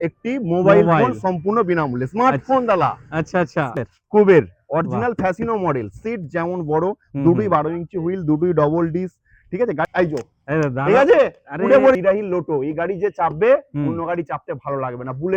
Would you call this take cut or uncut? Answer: cut